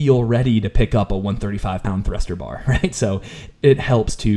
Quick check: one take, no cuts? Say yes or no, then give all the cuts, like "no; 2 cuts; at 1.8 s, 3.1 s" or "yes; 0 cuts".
yes; 0 cuts